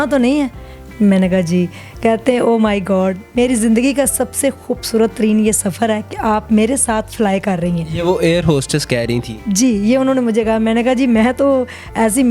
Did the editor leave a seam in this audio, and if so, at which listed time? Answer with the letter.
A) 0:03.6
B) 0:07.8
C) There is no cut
C